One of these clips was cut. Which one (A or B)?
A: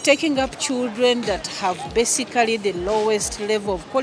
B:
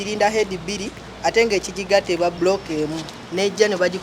B